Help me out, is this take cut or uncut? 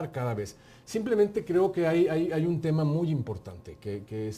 uncut